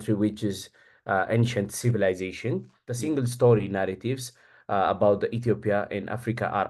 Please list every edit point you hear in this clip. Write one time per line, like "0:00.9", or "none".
0:02.8

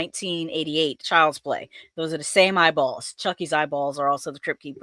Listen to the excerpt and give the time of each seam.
0:01.0

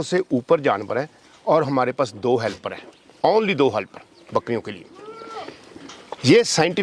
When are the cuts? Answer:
none

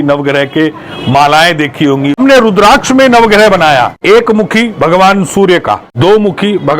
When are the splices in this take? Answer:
0:02.2
0:03.9
0:05.9

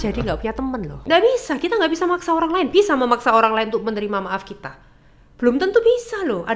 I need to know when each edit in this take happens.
0:00.9

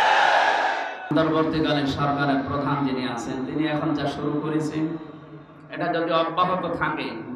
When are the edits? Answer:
0:01.1

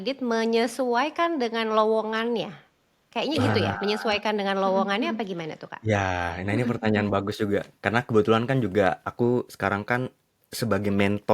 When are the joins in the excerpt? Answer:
none

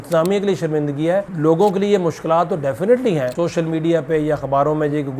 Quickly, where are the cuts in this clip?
0:01.3
0:03.3

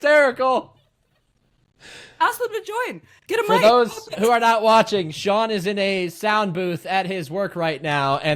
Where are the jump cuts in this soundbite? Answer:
none

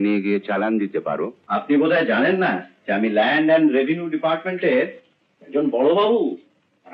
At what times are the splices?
0:01.4

